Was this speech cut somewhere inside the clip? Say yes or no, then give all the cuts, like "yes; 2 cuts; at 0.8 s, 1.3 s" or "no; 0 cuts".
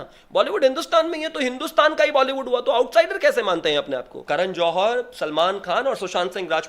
yes; 1 cut; at 4.1 s